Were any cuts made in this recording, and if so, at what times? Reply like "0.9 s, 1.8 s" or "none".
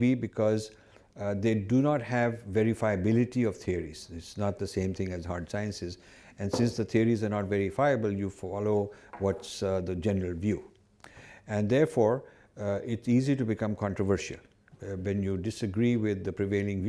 none